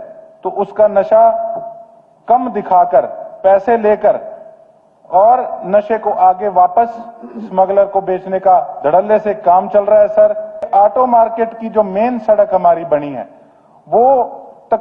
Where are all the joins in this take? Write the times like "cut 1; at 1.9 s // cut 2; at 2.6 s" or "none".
cut 1; at 10.5 s